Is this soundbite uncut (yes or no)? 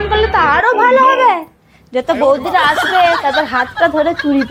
yes